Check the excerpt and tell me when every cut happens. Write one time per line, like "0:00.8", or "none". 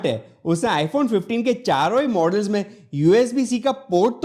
none